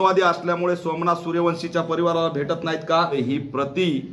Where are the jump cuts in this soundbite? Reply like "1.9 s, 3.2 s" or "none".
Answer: 3.2 s